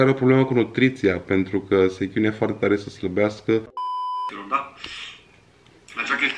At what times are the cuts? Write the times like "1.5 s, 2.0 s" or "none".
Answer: 3.9 s